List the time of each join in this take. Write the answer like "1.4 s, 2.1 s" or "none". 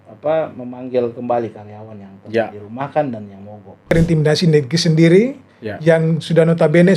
3.9 s